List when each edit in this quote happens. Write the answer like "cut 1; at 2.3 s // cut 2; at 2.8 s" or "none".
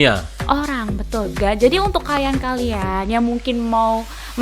cut 1; at 1.3 s